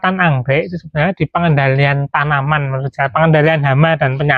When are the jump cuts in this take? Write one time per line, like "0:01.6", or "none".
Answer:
none